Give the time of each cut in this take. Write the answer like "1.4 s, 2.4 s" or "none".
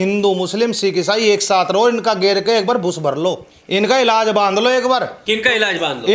3.5 s, 5.2 s